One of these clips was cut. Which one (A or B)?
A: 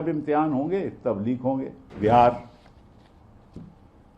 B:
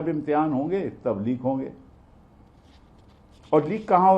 A